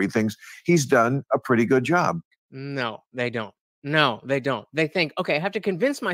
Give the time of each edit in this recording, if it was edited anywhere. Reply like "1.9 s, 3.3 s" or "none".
none